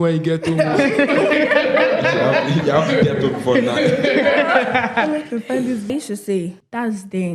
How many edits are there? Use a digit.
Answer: 1